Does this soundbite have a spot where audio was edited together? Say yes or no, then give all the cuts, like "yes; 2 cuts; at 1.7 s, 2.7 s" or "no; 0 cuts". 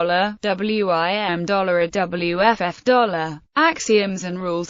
yes; 1 cut; at 3.1 s